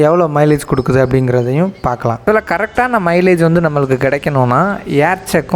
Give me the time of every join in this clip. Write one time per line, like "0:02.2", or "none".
0:02.2